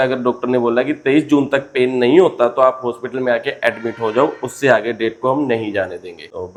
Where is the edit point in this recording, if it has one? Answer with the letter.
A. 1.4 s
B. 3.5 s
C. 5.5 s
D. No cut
D